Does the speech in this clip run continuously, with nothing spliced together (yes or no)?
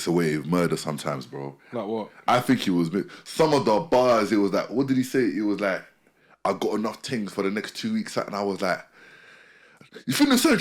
yes